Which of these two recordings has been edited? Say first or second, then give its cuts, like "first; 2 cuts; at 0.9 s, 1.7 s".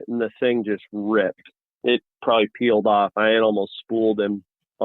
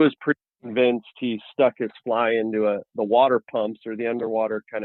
first; 1 cut; at 1.7 s